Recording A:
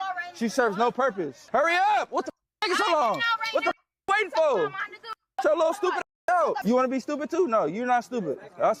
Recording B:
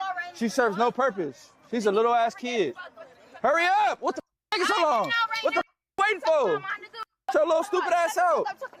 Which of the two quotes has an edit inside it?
A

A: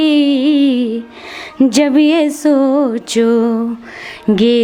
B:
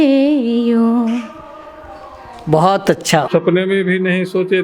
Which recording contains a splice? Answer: B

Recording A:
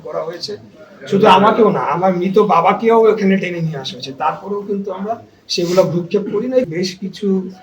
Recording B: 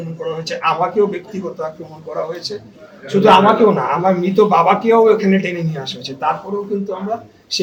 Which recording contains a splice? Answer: A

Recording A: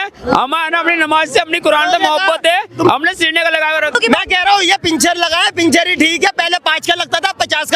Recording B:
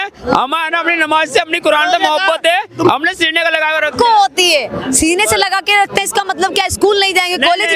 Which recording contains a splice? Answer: A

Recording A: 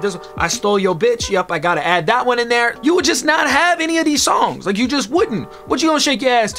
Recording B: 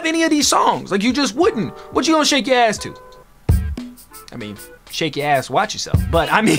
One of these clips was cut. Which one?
A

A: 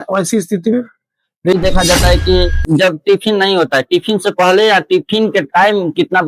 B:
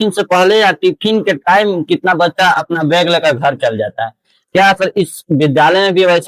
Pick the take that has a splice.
A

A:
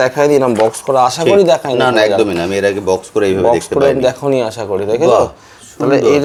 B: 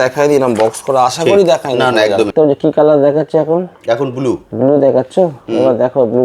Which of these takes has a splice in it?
B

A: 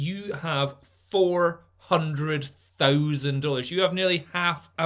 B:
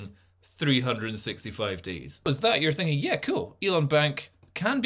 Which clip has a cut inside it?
B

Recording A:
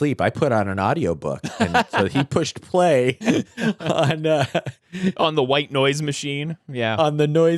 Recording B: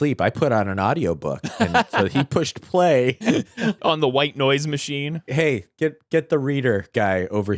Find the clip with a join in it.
B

